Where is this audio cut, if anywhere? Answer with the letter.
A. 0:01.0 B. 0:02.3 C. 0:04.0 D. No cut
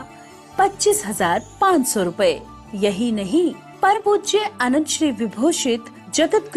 C